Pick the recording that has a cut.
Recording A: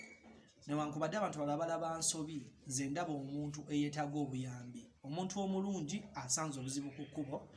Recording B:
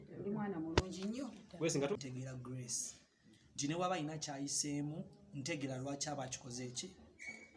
B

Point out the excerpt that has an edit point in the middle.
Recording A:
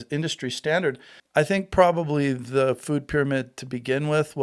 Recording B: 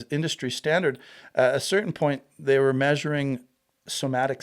A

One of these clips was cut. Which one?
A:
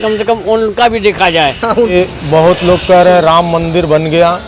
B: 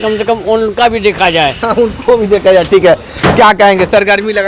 A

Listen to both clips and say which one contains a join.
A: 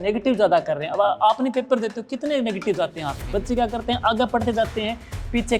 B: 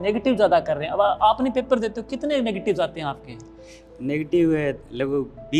A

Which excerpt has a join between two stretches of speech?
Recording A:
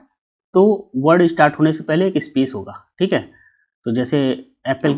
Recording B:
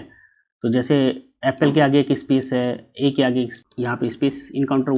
B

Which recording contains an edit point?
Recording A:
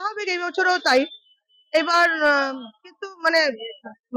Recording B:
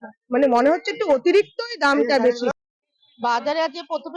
B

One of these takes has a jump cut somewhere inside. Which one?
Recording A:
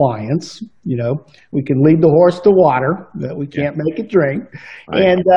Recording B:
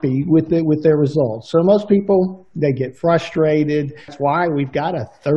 B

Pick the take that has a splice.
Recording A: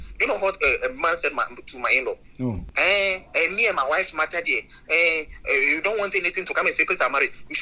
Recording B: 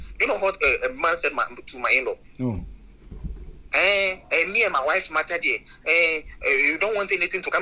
A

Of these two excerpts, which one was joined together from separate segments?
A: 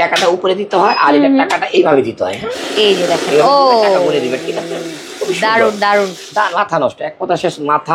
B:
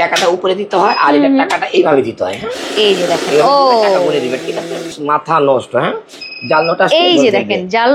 B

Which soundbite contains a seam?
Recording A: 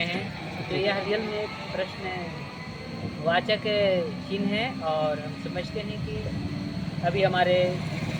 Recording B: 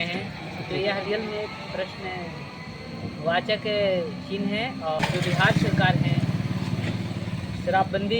B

